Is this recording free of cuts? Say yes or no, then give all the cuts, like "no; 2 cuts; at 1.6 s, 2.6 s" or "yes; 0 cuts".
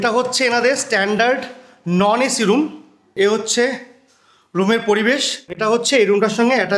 no; 2 cuts; at 3.0 s, 5.6 s